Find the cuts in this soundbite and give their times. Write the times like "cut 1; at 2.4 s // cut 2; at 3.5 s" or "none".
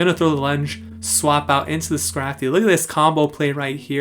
cut 1; at 1.0 s